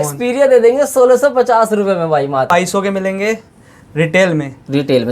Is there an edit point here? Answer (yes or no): yes